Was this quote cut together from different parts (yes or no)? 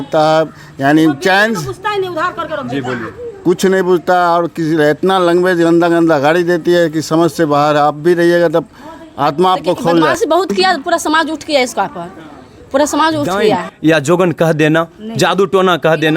yes